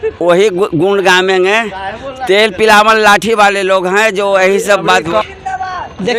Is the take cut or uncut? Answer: uncut